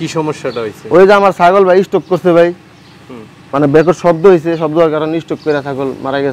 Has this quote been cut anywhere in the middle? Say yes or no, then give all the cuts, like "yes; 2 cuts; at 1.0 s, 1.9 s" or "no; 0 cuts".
no; 0 cuts